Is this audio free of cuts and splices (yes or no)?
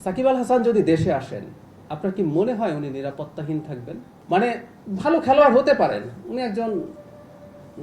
no